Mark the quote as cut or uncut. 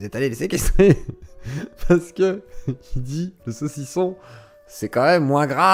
uncut